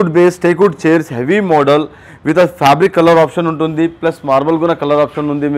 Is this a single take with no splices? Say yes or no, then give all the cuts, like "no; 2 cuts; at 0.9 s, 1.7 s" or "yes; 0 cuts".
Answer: yes; 0 cuts